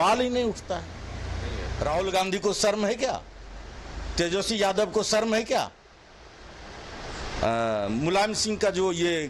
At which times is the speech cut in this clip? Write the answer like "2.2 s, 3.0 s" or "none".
1.6 s